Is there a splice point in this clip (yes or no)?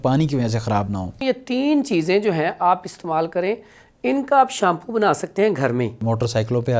yes